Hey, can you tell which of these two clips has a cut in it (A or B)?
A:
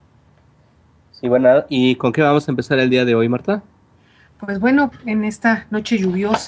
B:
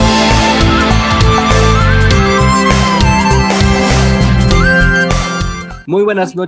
A